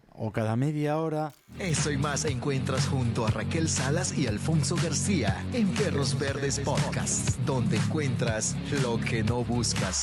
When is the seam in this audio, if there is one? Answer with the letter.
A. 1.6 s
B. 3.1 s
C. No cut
A